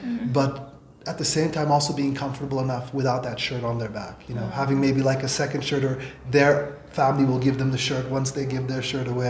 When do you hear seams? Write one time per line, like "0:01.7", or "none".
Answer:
none